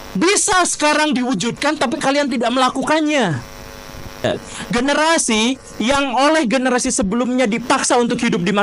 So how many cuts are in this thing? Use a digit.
1